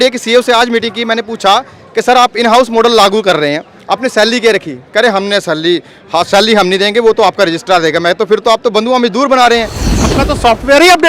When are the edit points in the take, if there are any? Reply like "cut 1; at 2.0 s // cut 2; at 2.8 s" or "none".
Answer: cut 1; at 10.0 s